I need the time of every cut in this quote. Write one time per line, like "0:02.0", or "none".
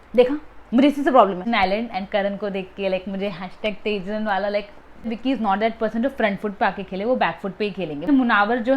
0:01.4
0:05.1
0:08.1